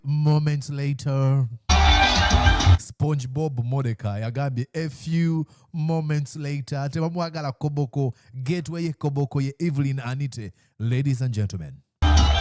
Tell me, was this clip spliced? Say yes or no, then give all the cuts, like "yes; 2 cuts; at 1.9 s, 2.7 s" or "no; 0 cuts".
no; 0 cuts